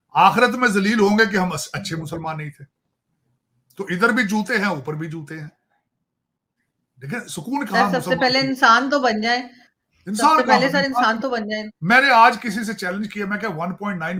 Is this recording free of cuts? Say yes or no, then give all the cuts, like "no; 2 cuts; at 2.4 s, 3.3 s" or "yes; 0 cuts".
yes; 0 cuts